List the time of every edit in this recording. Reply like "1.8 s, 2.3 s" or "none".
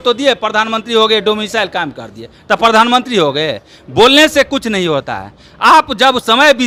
none